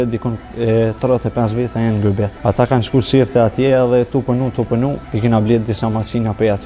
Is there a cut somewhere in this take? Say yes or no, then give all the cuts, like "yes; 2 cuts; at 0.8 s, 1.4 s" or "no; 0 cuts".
yes; 2 cuts; at 2.3 s, 5.1 s